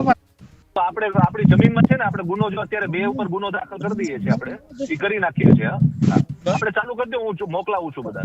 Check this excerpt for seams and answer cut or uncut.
uncut